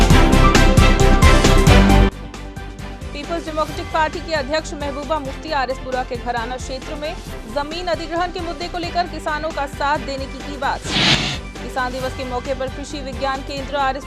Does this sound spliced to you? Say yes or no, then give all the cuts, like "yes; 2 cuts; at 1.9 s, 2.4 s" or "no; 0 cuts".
yes; 1 cut; at 11.1 s